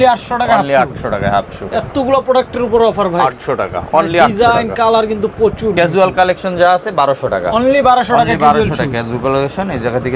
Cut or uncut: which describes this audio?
cut